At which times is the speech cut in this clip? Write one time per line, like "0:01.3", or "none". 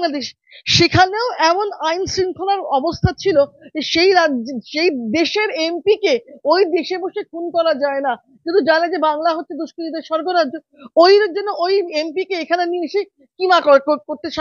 none

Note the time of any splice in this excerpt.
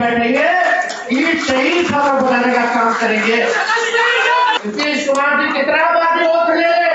0:04.6

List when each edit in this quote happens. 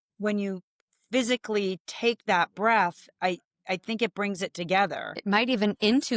0:05.1

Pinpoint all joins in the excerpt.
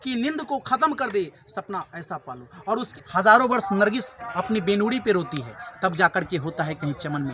0:02.9

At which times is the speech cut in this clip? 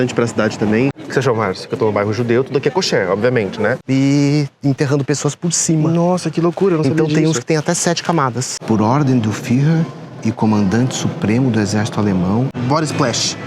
0:01.0
0:03.8
0:08.5
0:12.6

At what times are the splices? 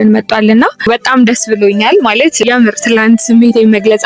0:00.9
0:02.4

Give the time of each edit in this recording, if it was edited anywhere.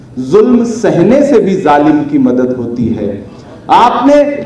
none

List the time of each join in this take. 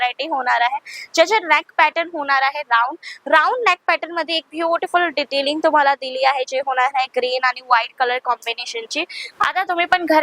0:09.2

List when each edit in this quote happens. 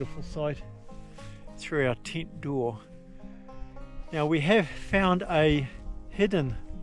none

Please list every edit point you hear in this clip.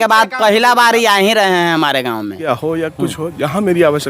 0:02.5

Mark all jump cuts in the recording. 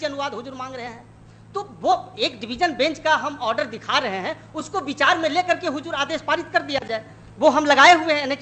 none

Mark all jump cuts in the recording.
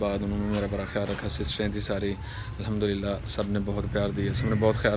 none

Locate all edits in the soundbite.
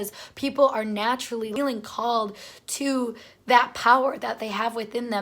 0:01.5

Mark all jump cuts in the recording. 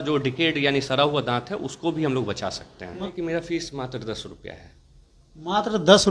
0:03.1

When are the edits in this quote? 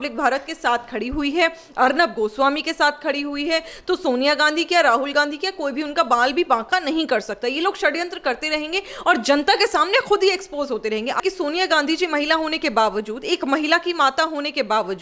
0:11.2

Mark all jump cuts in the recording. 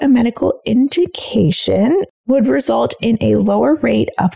0:02.1

